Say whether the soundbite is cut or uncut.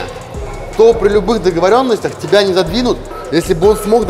cut